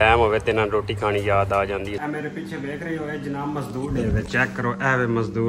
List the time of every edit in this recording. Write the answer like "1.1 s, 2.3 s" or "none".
2.0 s